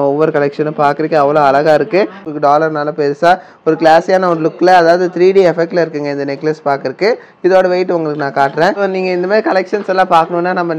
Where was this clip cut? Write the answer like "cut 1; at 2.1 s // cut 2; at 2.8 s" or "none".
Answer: cut 1; at 2.3 s // cut 2; at 9.0 s